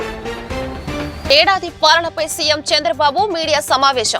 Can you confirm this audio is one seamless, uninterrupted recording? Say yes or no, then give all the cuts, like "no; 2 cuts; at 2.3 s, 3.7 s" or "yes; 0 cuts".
yes; 0 cuts